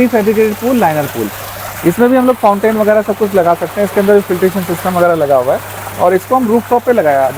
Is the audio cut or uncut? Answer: uncut